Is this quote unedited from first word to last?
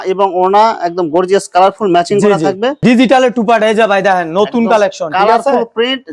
no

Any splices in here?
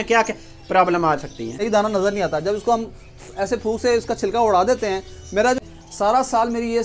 yes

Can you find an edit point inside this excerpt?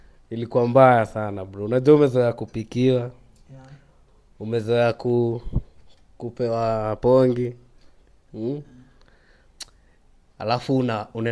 no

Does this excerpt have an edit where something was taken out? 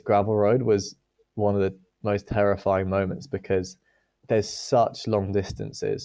no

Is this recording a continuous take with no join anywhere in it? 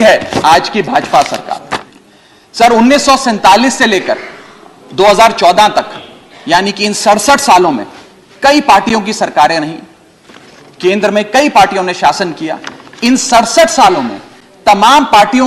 no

